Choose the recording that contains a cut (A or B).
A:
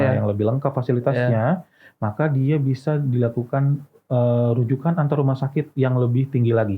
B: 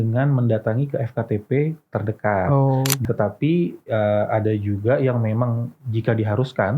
B